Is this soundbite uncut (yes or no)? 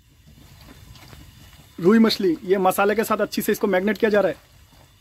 yes